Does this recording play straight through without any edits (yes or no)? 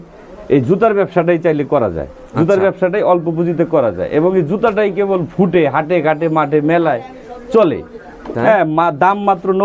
no